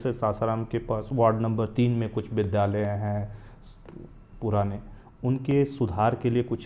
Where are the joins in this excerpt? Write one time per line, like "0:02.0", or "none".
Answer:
none